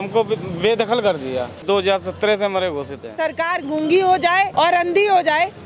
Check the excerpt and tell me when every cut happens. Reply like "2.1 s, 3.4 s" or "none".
1.6 s, 3.1 s, 4.5 s